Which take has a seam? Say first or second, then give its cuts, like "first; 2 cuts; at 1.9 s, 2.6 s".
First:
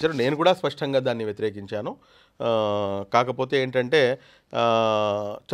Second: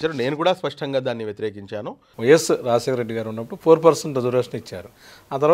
second; 1 cut; at 2.0 s